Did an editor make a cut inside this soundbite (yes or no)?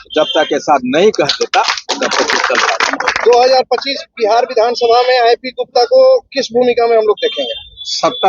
yes